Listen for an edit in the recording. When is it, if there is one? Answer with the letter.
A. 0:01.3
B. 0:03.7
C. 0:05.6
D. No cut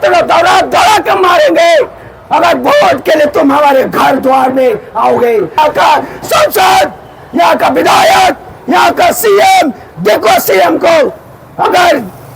C